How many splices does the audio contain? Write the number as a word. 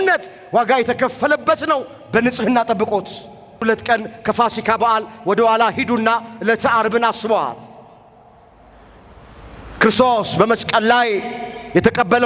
one